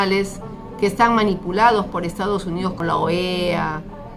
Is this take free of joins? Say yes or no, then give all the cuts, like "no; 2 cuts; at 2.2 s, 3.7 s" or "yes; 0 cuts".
no; 1 cut; at 2.8 s